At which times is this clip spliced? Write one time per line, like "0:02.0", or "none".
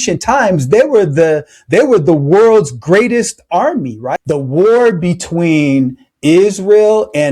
0:04.0